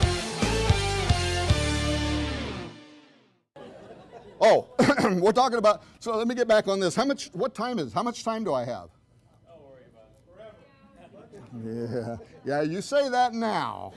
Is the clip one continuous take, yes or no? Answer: yes